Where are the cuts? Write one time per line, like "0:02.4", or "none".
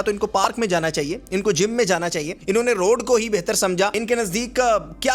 0:02.3
0:04.0

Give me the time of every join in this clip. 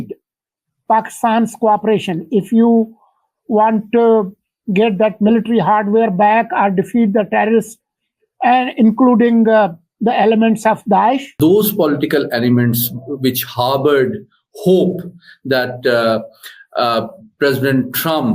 0:11.3

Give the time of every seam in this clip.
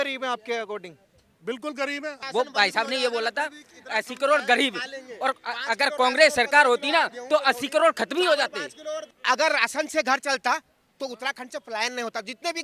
0:02.2
0:09.1

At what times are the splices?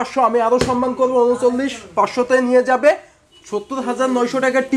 none

